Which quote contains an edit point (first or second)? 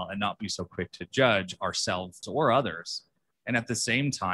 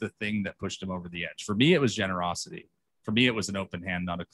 first